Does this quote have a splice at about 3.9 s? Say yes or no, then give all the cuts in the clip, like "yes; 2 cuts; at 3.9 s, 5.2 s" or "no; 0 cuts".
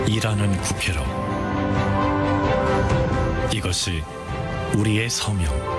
no; 0 cuts